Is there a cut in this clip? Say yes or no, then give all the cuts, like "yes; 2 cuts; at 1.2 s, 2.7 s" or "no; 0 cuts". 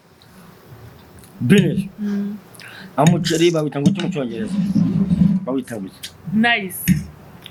no; 0 cuts